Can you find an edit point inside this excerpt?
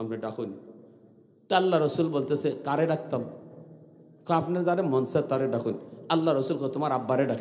no; 0 cuts

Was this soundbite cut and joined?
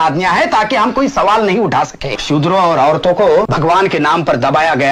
yes; 2 cuts; at 2.2 s, 3.5 s

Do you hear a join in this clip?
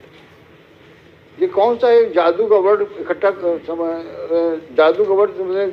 no; 0 cuts

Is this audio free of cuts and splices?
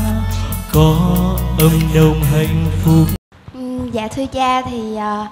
no; 1 cut; at 3.1 s

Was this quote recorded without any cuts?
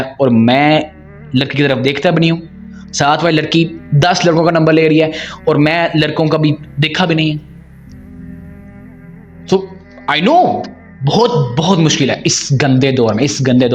yes; 0 cuts

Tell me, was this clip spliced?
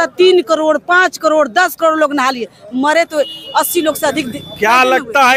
no; 0 cuts

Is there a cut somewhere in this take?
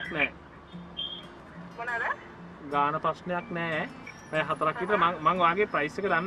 no; 0 cuts

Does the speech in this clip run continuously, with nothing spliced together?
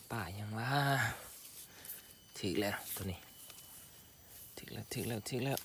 yes; 0 cuts

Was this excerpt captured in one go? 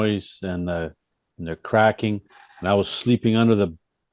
yes; 0 cuts

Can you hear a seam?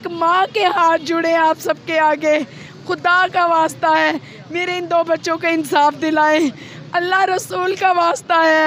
no; 0 cuts

